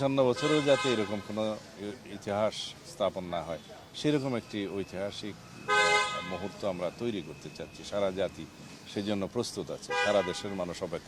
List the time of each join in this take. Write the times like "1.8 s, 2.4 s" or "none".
none